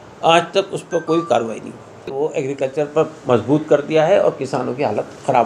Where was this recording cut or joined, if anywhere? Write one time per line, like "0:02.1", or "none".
0:02.1